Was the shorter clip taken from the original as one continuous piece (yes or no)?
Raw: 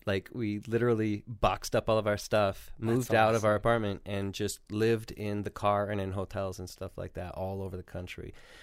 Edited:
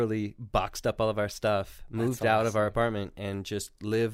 yes